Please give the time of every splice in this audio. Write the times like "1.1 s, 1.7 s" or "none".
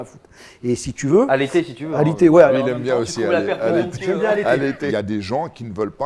2.5 s, 4.9 s